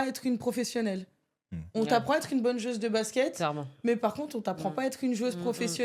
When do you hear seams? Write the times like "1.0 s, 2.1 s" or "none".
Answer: none